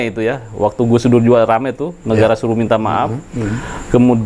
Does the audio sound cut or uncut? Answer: uncut